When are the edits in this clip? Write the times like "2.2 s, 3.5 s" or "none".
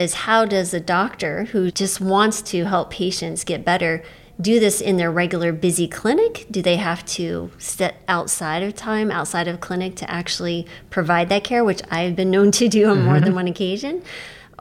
1.7 s